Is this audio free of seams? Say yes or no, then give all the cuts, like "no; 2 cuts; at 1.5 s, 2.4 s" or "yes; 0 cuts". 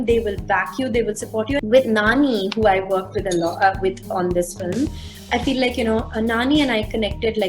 no; 1 cut; at 1.6 s